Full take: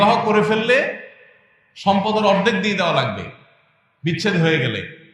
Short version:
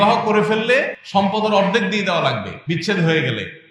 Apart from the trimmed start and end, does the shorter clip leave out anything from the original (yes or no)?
yes